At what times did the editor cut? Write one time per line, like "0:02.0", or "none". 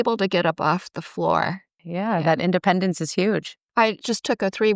0:01.8
0:03.6